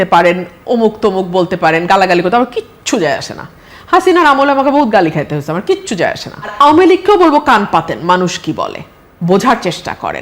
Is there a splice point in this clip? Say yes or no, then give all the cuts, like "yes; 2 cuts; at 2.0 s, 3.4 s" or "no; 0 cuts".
yes; 1 cut; at 6.5 s